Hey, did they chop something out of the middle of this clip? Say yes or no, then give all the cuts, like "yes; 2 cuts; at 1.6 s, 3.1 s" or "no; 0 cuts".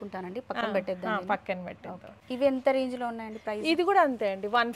yes; 1 cut; at 2.1 s